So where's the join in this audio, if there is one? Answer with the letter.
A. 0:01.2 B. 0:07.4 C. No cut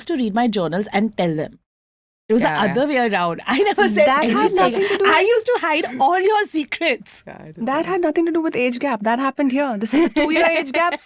C